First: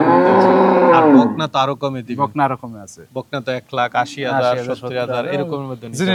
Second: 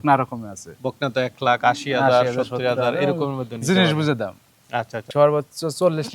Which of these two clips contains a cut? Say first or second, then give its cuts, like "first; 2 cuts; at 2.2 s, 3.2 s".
second; 1 cut; at 5.0 s